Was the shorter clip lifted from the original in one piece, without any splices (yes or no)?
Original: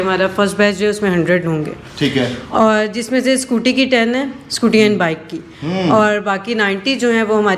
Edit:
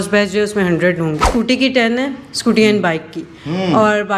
no